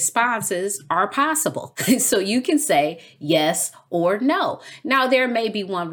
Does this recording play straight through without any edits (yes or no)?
no